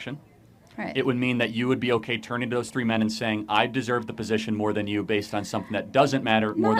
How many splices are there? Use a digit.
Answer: 0